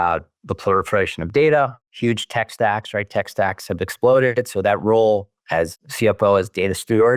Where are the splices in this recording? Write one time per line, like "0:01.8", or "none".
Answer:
0:05.8